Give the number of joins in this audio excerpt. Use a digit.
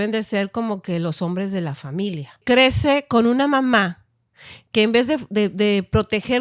1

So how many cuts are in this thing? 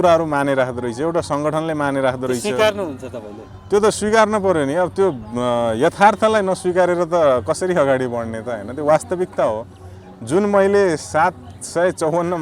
0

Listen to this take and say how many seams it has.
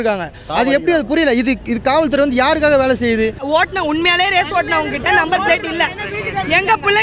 1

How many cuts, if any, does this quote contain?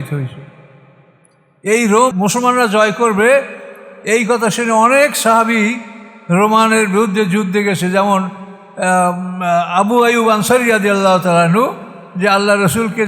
1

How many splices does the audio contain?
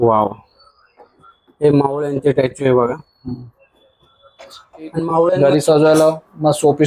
1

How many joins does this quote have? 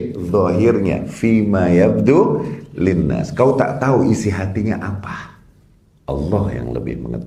0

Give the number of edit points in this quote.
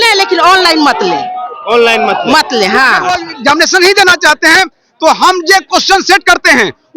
1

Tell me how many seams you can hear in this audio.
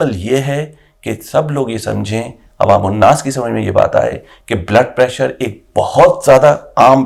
0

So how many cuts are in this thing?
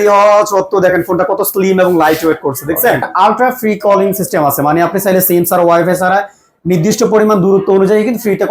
1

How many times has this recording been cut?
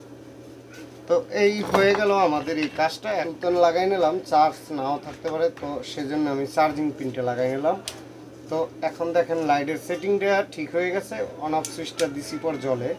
0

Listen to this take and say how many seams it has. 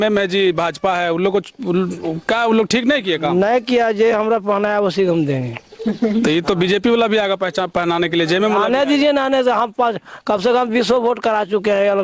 0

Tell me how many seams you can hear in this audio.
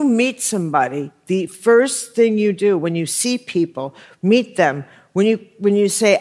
0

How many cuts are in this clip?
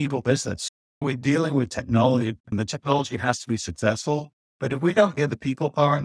1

